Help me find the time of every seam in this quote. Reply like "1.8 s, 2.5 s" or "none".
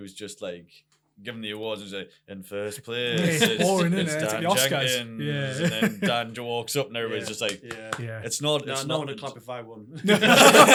none